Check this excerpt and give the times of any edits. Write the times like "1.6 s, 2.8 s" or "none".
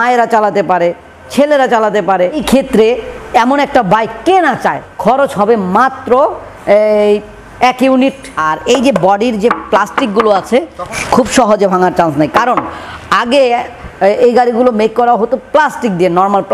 2.4 s, 4.8 s, 8.3 s, 10.8 s